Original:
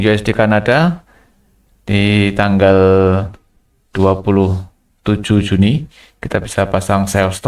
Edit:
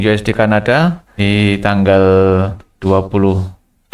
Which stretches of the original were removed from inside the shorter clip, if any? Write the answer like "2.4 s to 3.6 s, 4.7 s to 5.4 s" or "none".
1.1 s to 1.8 s, 3.4 s to 3.8 s